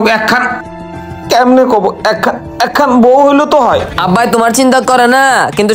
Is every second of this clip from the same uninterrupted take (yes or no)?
no